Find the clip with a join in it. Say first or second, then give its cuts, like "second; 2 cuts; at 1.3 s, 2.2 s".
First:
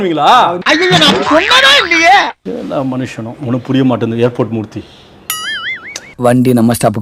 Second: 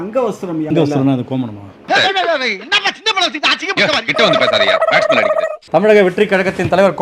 second; 2 cuts; at 0.7 s, 5.6 s